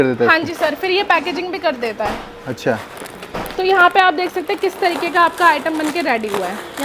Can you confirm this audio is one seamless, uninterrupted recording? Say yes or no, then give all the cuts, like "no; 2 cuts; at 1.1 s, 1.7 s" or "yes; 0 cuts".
yes; 0 cuts